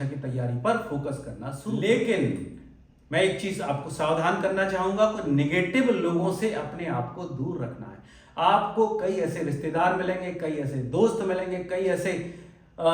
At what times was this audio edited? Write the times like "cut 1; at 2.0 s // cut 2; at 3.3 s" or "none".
cut 1; at 1.8 s